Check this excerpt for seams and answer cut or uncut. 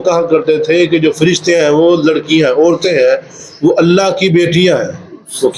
uncut